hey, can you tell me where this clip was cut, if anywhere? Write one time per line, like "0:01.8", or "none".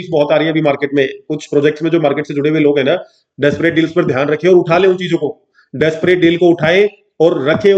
none